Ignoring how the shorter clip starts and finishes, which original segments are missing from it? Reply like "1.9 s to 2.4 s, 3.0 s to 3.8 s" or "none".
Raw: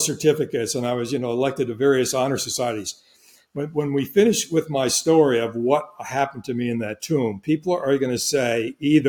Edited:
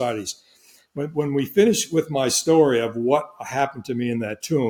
none